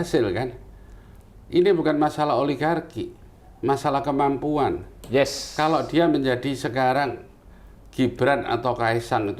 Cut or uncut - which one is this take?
uncut